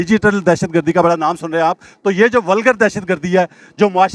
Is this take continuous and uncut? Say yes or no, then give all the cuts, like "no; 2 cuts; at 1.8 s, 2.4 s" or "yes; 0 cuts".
yes; 0 cuts